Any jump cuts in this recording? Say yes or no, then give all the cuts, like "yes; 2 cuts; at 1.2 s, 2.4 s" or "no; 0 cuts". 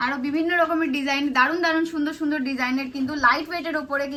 no; 0 cuts